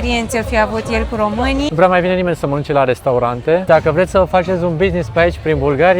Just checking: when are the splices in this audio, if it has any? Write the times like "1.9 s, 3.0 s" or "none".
1.7 s, 3.6 s